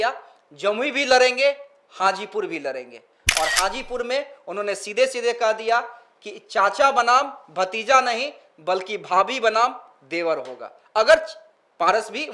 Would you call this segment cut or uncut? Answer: uncut